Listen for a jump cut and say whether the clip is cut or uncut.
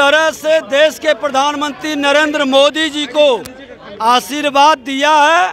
uncut